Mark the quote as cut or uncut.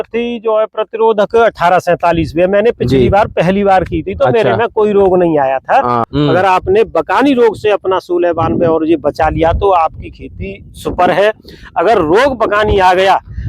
cut